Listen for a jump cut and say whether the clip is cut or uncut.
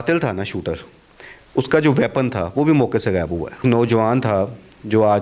cut